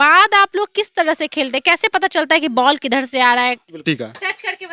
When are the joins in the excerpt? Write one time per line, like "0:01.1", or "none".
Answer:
0:03.8